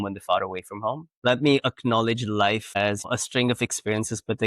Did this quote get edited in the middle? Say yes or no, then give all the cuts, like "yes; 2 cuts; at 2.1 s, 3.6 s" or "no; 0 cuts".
yes; 2 cuts; at 1.1 s, 3.1 s